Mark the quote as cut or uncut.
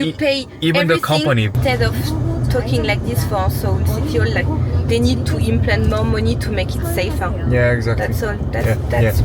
cut